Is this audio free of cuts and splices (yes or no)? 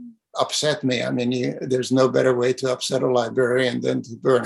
yes